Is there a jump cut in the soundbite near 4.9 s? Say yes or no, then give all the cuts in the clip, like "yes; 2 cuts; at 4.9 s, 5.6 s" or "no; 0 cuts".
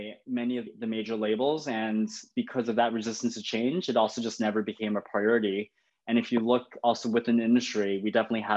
no; 0 cuts